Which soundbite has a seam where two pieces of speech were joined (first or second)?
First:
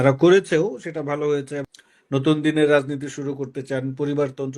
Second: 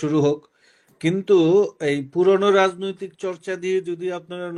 first